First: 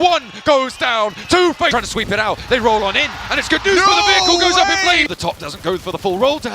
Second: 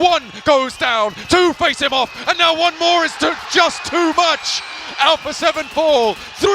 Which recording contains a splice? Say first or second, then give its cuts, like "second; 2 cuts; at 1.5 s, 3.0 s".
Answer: first; 2 cuts; at 1.7 s, 5.1 s